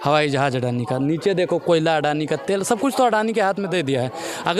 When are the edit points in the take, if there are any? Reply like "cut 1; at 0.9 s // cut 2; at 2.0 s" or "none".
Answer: none